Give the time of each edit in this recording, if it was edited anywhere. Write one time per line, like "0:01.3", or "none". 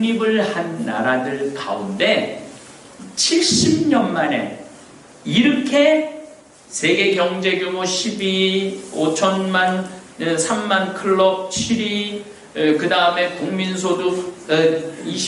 none